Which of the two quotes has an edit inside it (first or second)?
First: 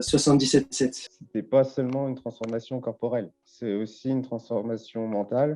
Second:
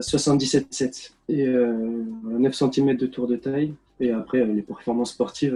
first